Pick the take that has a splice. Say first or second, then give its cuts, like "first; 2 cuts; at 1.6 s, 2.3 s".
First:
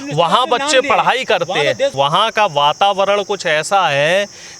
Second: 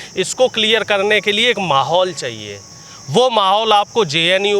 first; 1 cut; at 1.9 s